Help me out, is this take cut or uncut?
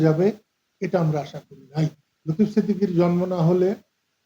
cut